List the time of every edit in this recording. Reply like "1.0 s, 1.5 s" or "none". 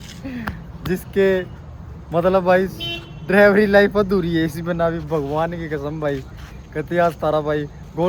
none